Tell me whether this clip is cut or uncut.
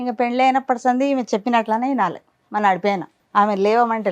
cut